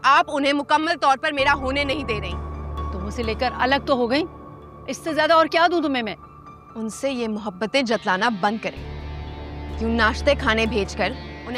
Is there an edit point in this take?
no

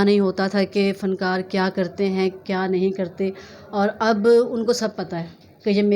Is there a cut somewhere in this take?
no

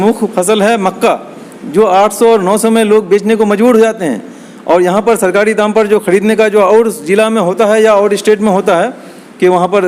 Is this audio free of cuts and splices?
yes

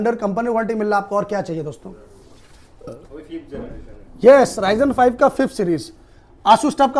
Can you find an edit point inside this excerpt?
no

